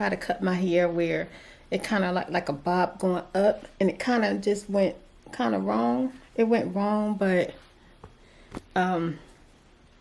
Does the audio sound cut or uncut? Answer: uncut